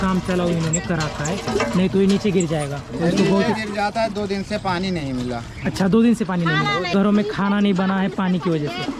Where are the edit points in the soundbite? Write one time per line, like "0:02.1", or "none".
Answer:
none